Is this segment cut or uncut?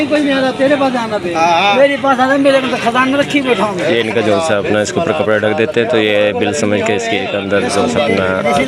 uncut